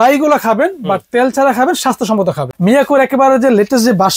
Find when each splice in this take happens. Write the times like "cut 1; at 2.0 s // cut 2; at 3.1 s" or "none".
cut 1; at 2.5 s